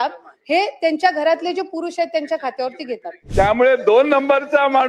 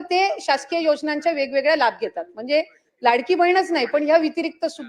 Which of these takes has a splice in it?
first; 1 cut; at 3.2 s

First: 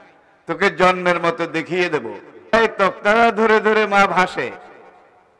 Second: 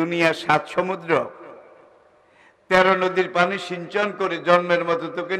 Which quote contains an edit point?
first; 1 cut; at 2.5 s

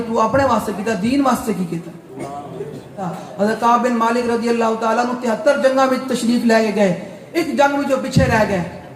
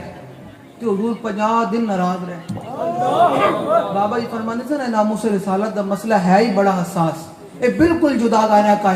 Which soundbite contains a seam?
first; 1 cut; at 3.2 s

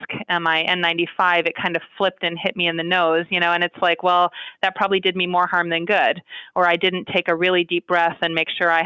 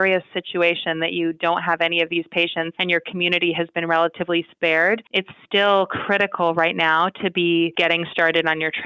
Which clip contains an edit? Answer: second; 3 cuts; at 2.8 s, 5.1 s, 7.7 s

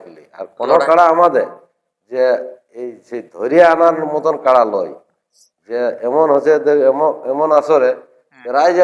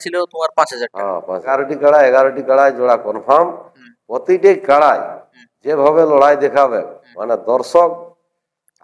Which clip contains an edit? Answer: second; 1 cut; at 1.5 s

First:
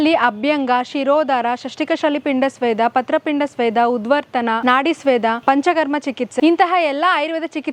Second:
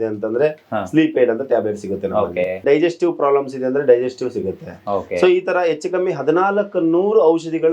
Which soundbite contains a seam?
second; 1 cut; at 2.6 s

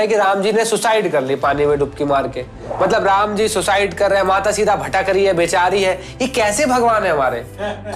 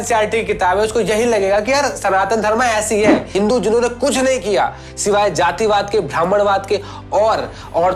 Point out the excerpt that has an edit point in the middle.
second; 1 cut; at 3.3 s

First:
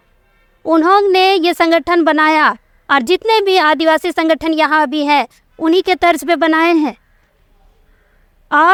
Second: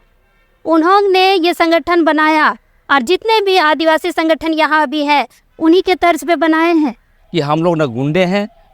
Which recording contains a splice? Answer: second; 1 cut; at 7.2 s

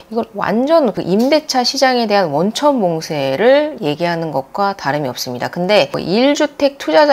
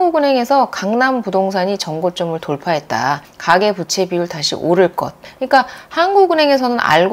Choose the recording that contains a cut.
first; 1 cut; at 6.0 s

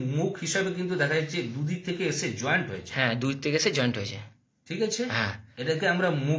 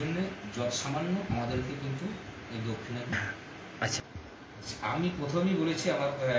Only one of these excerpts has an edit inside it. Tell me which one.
second; 1 cut; at 3.9 s

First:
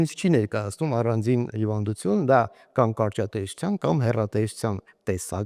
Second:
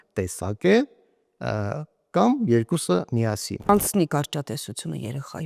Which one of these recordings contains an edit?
second; 1 cut; at 3.7 s

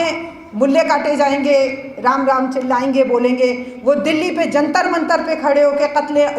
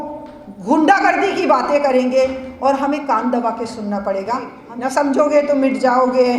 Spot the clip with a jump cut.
second; 1 cut; at 4.6 s

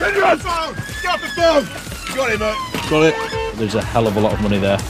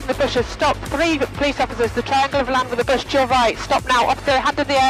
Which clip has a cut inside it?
first; 1 cut; at 3.6 s

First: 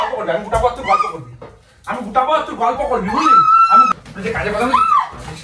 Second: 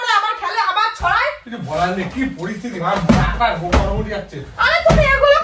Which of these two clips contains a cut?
first; 1 cut; at 3.9 s

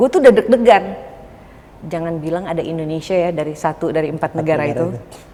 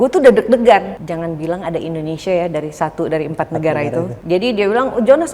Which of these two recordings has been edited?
second; 2 cuts; at 1.0 s, 4.2 s

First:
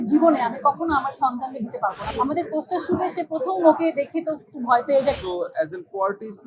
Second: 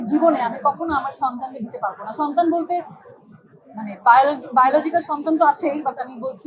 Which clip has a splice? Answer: first; 2 cuts; at 2.0 s, 5.2 s

